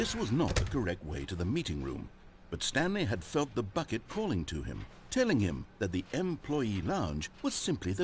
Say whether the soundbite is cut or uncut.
uncut